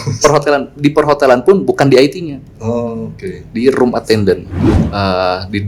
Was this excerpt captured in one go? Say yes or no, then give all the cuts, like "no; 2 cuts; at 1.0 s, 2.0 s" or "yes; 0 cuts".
no; 1 cut; at 4.6 s